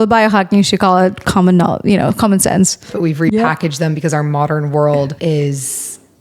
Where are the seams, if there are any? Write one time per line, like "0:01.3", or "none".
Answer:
0:02.9
0:05.1